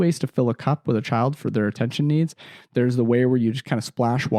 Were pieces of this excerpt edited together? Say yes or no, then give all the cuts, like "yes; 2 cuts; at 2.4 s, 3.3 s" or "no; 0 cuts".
no; 0 cuts